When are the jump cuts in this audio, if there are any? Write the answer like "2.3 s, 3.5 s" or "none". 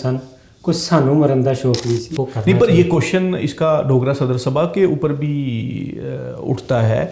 2.2 s